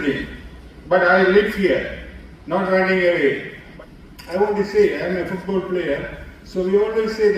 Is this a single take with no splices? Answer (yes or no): no